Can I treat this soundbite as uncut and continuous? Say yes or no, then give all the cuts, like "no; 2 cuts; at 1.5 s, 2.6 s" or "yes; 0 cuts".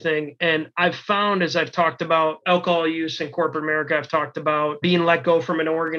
no; 2 cuts; at 2.4 s, 4.8 s